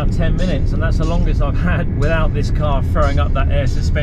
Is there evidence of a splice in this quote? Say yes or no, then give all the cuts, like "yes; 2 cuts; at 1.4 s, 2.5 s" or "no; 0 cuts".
yes; 1 cut; at 1.9 s